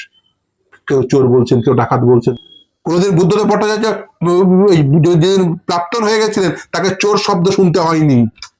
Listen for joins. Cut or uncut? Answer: cut